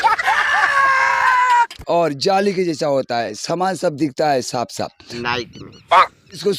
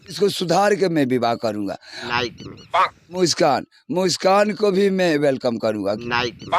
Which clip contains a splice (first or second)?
first